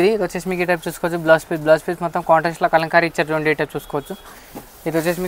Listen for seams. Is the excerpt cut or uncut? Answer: uncut